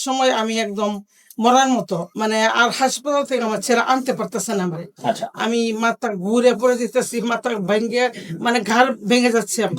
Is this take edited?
yes; 1 cut; at 2.1 s

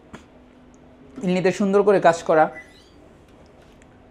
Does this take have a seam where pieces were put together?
no; 0 cuts

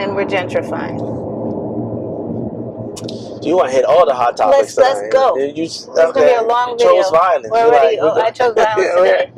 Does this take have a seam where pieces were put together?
no; 0 cuts

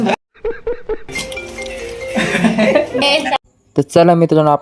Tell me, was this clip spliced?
yes; 2 cuts; at 1.0 s, 3.0 s

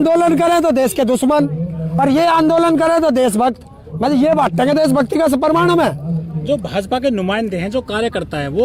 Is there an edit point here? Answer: no; 0 cuts

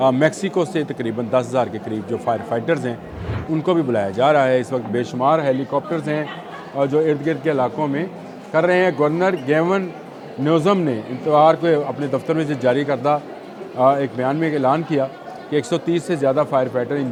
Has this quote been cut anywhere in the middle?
no; 0 cuts

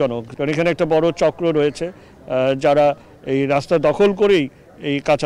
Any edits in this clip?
no; 0 cuts

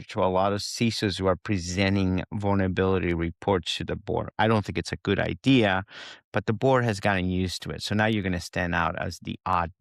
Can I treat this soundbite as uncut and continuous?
yes; 0 cuts

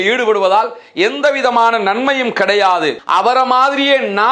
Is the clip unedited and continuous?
no; 1 cut; at 3.0 s

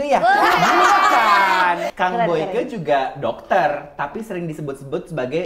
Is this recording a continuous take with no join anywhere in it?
no; 1 cut; at 1.9 s

